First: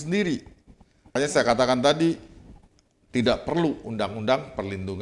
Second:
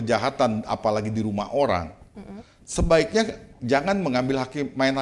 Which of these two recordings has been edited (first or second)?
first